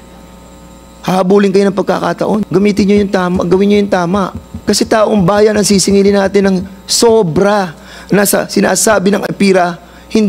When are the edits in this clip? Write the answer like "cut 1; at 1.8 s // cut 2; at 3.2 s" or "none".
cut 1; at 2.5 s // cut 2; at 4.5 s